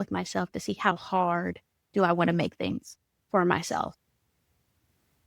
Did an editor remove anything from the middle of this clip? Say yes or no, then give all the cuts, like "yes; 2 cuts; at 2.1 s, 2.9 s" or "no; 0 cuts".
no; 0 cuts